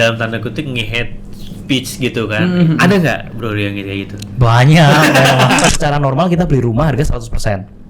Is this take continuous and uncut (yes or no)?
no